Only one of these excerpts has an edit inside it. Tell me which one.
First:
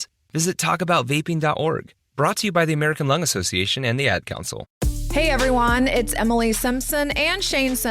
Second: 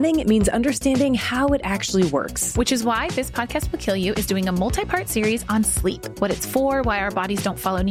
first; 1 cut; at 4.6 s

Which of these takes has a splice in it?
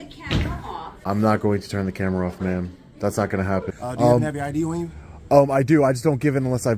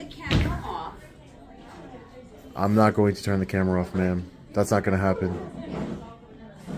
first; 2 cuts; at 1.0 s, 3.7 s

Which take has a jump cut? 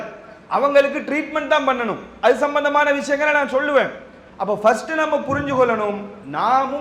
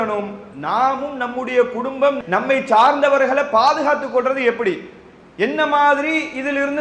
second; 1 cut; at 2.2 s

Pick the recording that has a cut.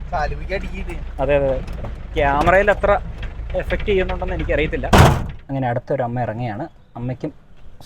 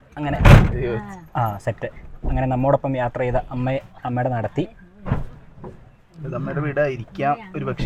first; 1 cut; at 4.8 s

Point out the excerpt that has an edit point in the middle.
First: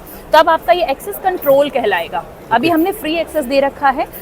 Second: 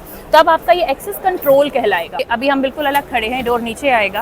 second; 1 cut; at 2.2 s

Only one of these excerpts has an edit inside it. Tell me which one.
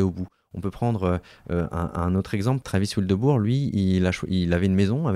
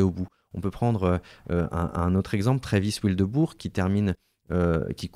first; 1 cut; at 2.6 s

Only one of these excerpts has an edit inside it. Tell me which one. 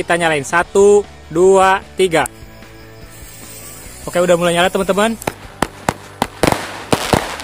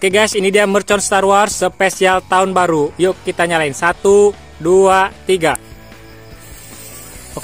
first; 1 cut; at 5.2 s

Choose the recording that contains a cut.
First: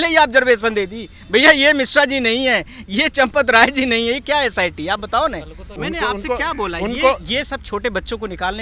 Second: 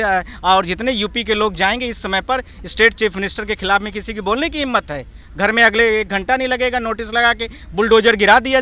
first; 1 cut; at 5.8 s

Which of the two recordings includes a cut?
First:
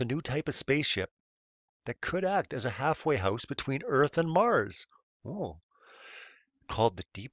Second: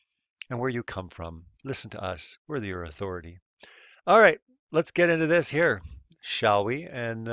second; 1 cut; at 5.9 s

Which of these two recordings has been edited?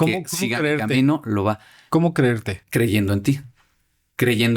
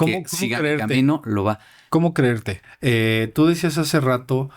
second; 1 cut; at 2.5 s

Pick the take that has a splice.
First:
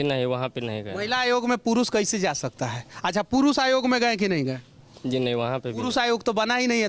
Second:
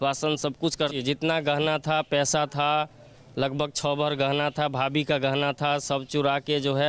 second; 1 cut; at 0.9 s

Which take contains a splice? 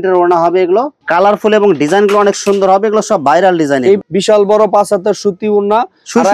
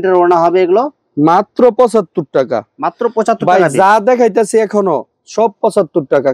first; 2 cuts; at 1.0 s, 4.0 s

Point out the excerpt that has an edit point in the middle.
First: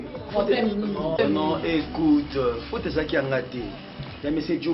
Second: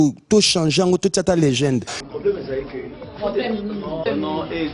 second; 1 cut; at 2.0 s

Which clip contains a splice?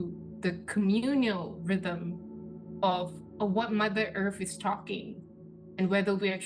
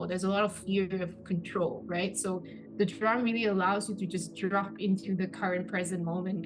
first; 1 cut; at 3.2 s

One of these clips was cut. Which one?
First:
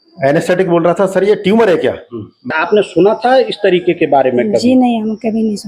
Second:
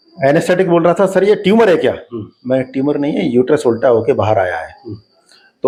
first; 1 cut; at 2.5 s

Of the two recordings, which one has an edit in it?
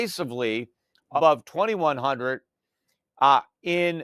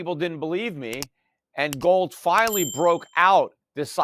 first; 1 cut; at 1.1 s

